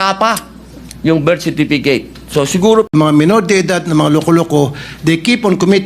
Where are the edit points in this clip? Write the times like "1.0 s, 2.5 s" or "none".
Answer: 2.9 s